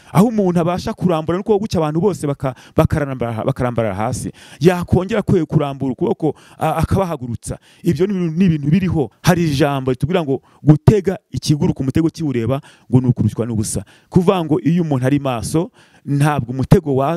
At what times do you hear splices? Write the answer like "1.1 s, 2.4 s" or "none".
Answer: 9.1 s